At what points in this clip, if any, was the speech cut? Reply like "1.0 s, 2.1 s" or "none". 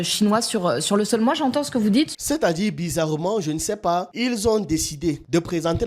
2.1 s